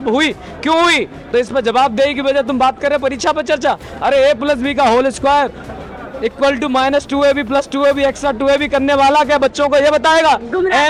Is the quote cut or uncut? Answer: uncut